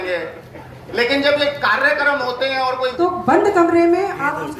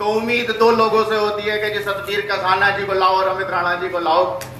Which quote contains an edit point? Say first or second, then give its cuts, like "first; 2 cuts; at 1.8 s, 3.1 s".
first; 1 cut; at 2.9 s